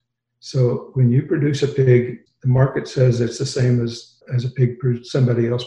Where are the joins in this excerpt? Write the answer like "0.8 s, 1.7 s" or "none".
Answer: 2.3 s, 4.2 s